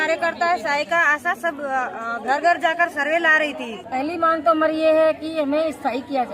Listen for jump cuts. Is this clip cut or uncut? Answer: cut